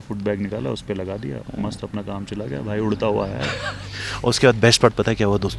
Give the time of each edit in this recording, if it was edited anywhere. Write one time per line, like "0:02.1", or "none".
none